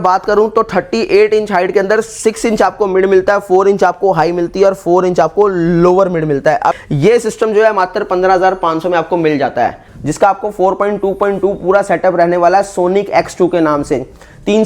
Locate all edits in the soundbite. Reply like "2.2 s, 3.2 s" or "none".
6.8 s, 9.9 s